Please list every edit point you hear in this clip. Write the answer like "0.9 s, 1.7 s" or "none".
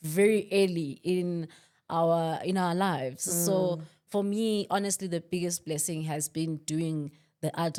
none